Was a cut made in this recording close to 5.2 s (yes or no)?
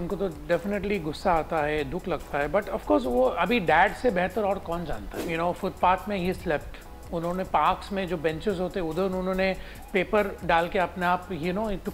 yes